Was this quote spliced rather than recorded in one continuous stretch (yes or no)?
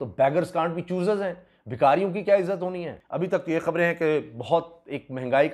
yes